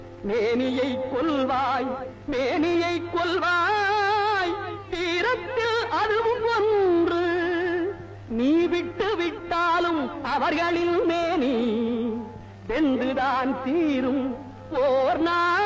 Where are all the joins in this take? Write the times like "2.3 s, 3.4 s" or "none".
3.4 s